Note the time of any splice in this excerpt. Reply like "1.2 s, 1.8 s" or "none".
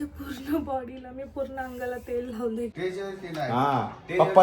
2.7 s